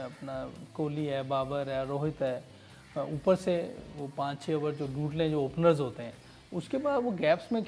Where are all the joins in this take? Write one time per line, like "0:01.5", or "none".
none